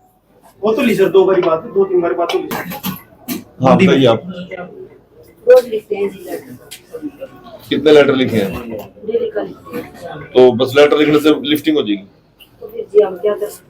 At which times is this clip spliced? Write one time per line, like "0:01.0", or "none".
0:02.7